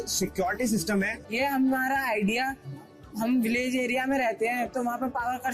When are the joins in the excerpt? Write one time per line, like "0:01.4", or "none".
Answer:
0:01.2